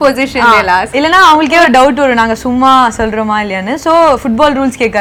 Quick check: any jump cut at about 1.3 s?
no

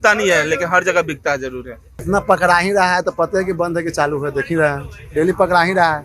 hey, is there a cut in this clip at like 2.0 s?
yes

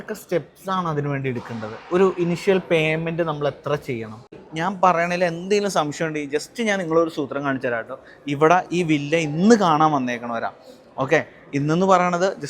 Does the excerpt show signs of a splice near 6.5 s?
no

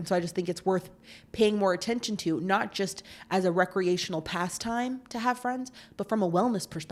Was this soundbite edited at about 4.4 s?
no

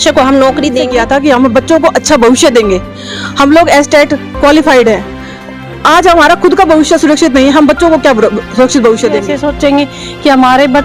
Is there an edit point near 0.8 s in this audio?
yes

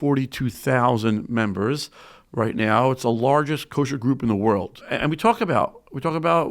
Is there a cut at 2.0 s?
no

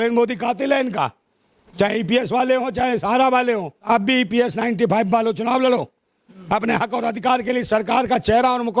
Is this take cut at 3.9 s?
yes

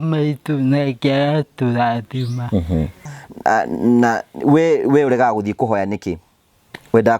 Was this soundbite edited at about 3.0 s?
yes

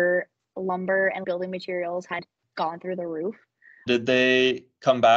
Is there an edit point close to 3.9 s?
yes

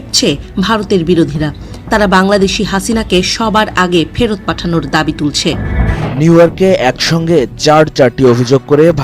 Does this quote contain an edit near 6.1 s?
yes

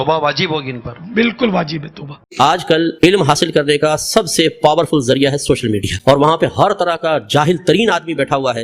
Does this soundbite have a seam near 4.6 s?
no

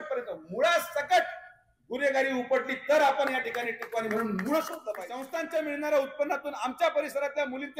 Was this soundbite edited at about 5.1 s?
yes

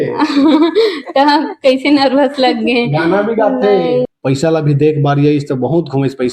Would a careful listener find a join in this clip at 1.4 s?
no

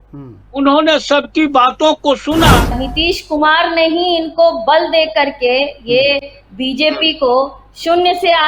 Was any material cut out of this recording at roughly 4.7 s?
no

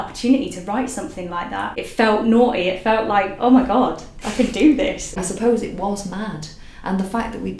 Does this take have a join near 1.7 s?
yes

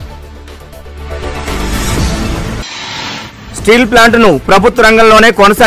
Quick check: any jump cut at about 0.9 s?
no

